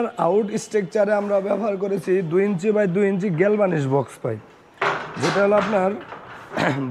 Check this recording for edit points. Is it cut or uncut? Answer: uncut